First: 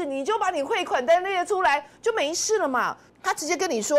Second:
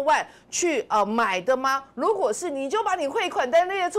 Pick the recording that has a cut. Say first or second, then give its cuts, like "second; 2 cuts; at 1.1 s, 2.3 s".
first; 1 cut; at 3.0 s